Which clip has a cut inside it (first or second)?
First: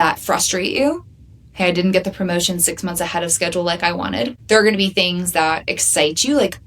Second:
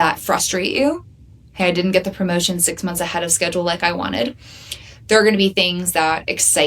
first